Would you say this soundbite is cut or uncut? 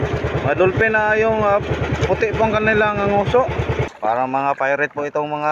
cut